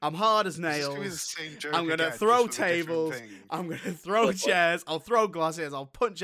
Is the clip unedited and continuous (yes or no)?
yes